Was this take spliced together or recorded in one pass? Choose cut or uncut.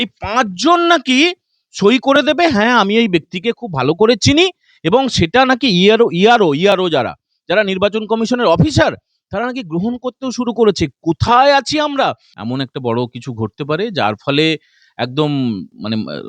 cut